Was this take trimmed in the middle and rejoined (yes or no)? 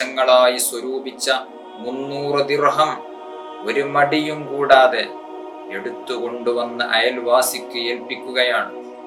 no